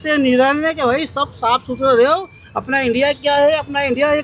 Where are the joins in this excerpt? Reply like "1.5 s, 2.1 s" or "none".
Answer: none

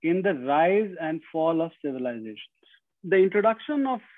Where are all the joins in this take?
2.9 s

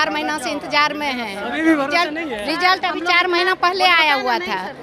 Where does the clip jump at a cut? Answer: none

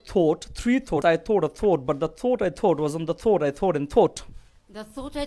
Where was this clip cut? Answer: 1.0 s

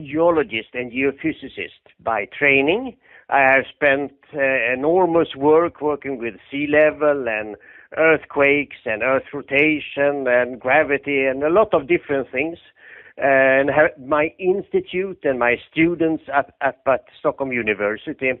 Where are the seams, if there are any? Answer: none

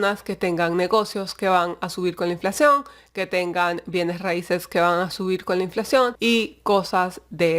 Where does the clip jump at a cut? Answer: 6.2 s

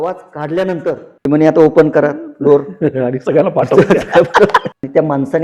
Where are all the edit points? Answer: 1.1 s, 4.7 s

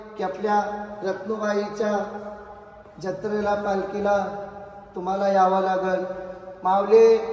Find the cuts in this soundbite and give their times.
none

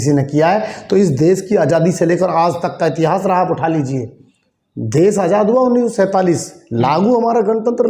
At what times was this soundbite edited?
none

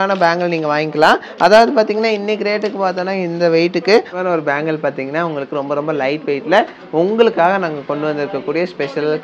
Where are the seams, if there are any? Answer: 4.1 s

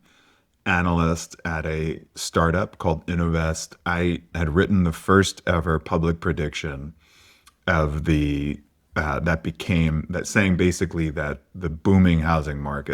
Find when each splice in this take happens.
4.3 s, 11.4 s

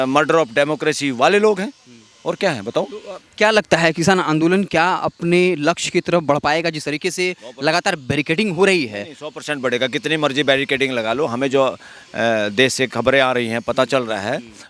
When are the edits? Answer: none

